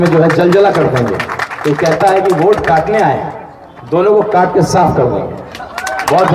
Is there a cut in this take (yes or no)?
no